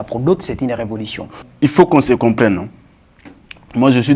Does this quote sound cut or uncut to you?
cut